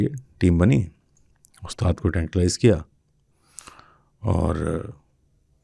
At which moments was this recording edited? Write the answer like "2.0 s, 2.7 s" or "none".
none